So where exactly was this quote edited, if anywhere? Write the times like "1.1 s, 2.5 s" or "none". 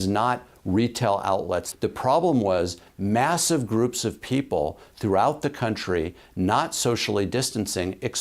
1.7 s